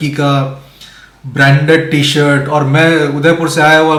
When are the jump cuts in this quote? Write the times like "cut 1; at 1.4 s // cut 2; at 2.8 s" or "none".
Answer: none